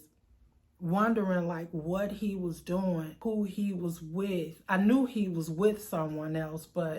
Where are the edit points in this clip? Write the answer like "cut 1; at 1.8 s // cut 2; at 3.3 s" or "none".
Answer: cut 1; at 3.1 s